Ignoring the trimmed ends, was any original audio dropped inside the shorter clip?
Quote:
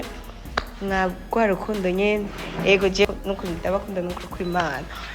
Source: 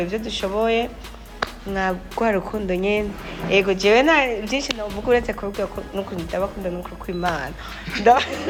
yes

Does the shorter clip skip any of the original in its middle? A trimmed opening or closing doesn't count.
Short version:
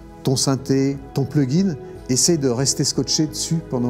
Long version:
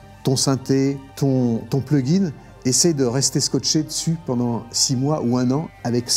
yes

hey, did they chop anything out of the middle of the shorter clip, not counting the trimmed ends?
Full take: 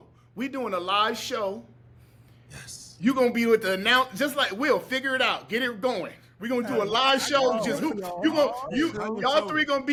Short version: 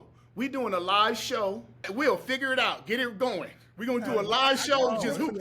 yes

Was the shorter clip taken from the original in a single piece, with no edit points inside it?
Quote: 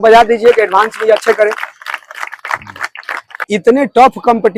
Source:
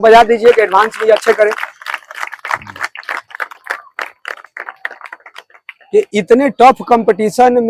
no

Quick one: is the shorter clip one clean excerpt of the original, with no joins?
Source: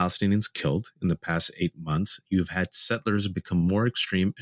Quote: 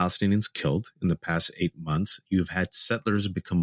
yes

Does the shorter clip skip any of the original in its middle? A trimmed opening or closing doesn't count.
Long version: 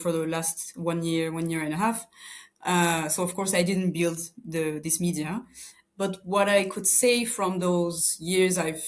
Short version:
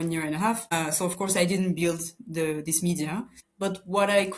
yes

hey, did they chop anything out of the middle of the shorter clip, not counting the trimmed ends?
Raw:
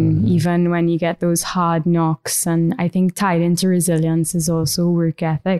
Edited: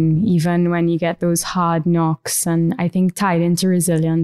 no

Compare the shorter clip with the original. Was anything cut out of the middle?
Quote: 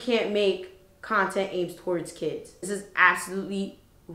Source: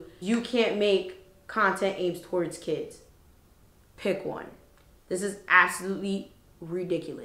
yes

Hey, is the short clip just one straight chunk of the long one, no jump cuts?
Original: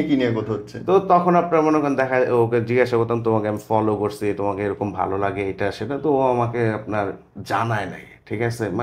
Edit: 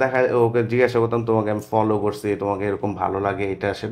yes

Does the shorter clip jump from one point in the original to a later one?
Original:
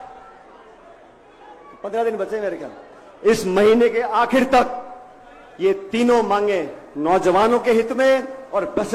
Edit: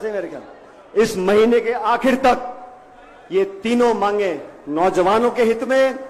no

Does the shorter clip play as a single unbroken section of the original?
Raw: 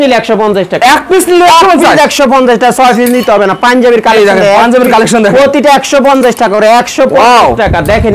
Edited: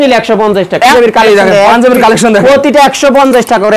no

